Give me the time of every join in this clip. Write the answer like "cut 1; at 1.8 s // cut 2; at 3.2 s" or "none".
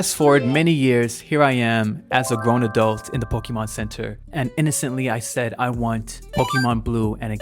cut 1; at 4.2 s